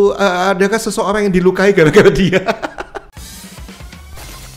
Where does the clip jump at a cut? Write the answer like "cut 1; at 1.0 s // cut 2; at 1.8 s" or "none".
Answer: cut 1; at 3.2 s